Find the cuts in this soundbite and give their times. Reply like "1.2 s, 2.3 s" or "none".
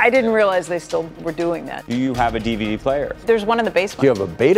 3.2 s